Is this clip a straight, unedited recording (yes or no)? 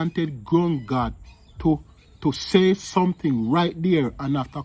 yes